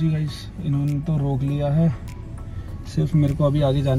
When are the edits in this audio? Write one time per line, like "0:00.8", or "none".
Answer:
none